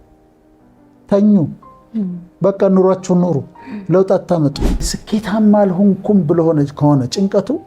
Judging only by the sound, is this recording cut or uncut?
cut